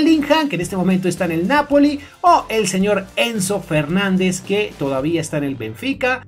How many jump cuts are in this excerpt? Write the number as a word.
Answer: zero